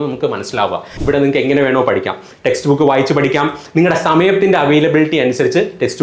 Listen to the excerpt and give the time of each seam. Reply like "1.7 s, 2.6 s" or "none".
1.0 s